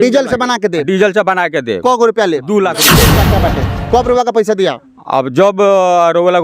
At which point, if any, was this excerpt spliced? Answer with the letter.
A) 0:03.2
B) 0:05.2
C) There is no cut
A